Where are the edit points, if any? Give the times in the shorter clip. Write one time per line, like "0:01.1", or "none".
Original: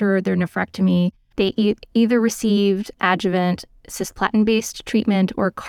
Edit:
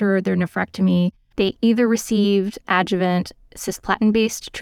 0:01.5